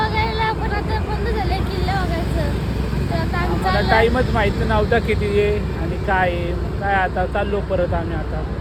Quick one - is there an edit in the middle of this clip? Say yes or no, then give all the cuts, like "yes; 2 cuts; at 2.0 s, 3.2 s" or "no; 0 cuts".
no; 0 cuts